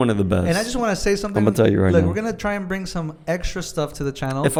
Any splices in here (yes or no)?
no